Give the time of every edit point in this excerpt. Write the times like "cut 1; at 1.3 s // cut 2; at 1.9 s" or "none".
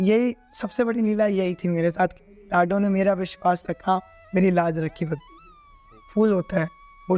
cut 1; at 5.8 s